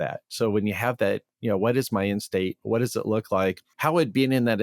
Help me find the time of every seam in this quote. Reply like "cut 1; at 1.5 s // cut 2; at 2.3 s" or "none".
cut 1; at 3.7 s